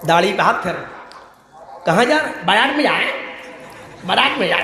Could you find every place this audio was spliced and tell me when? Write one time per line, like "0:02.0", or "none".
none